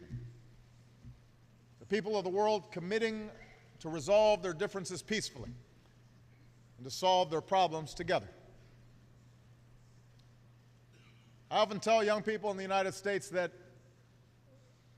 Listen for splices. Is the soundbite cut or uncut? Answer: cut